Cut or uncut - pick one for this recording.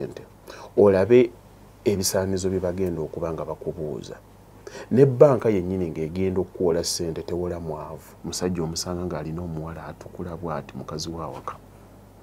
cut